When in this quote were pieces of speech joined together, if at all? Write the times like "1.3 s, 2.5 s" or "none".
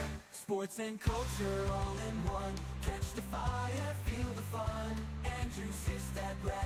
none

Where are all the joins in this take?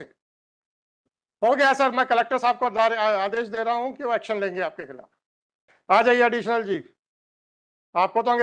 5.5 s

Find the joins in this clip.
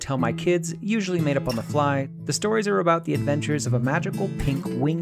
2.1 s

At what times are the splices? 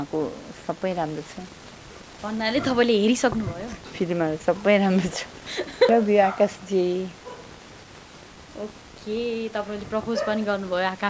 5.9 s

